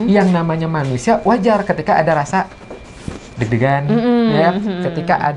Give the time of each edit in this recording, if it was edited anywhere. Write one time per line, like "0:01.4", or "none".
none